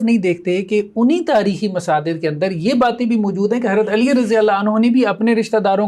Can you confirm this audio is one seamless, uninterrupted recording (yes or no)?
yes